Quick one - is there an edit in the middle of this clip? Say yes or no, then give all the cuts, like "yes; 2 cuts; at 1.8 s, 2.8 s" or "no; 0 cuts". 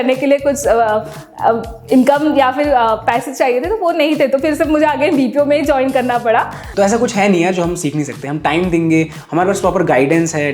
yes; 1 cut; at 6.6 s